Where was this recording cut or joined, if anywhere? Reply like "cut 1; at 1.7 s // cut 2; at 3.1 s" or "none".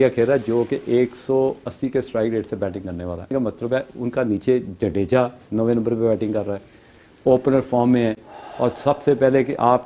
cut 1; at 3.3 s